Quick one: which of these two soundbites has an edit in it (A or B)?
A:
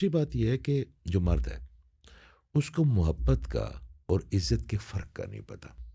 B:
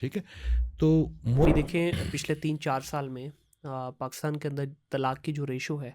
B